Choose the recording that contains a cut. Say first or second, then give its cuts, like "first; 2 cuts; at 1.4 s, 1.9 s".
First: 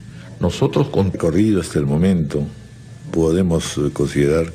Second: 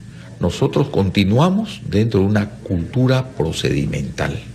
second; 1 cut; at 1.1 s